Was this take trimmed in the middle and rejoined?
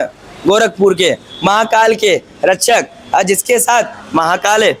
no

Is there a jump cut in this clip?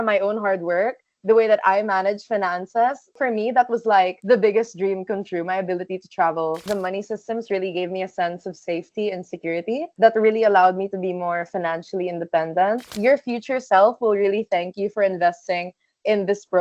yes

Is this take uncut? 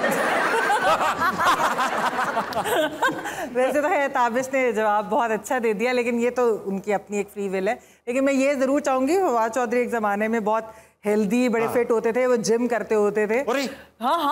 yes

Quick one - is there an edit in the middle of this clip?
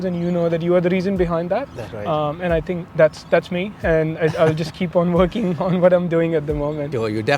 no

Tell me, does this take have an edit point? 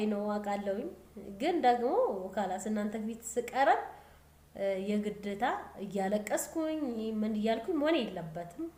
no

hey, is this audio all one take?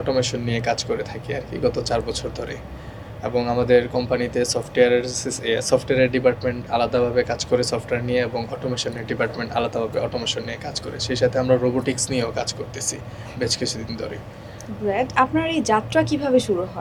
yes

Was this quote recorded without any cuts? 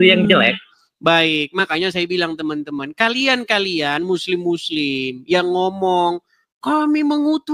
yes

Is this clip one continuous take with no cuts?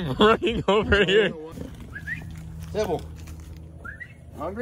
no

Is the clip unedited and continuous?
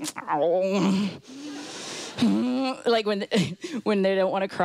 yes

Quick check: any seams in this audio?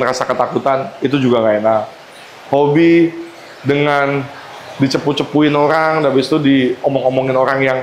no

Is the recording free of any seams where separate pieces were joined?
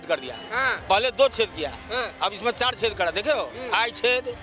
yes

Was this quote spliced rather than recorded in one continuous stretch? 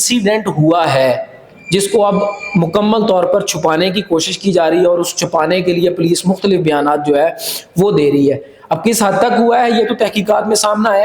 no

